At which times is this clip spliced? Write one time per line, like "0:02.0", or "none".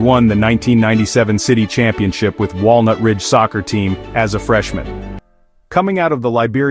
0:05.1